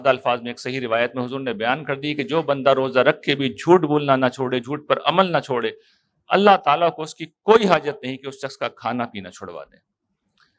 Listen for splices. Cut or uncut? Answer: uncut